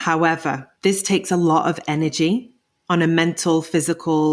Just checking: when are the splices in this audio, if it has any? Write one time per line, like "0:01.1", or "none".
none